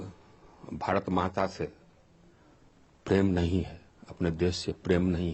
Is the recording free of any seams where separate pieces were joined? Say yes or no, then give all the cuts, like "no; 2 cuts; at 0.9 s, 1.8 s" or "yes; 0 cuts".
yes; 0 cuts